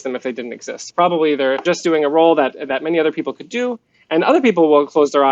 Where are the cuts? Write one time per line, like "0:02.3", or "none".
0:01.6